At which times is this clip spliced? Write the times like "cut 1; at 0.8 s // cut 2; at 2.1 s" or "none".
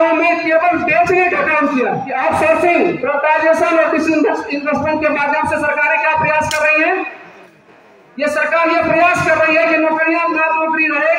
cut 1; at 2.1 s